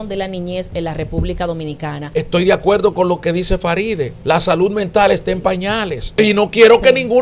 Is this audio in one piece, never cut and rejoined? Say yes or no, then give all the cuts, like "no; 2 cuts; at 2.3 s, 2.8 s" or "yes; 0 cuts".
no; 3 cuts; at 2.0 s, 4.1 s, 6.1 s